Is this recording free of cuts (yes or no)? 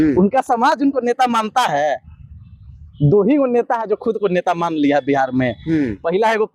yes